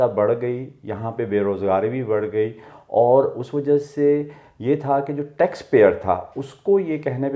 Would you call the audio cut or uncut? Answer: uncut